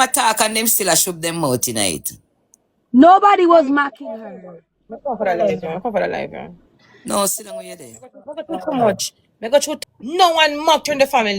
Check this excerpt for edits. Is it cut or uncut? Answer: cut